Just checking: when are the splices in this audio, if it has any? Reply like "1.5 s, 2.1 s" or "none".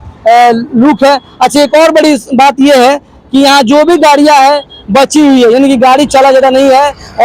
none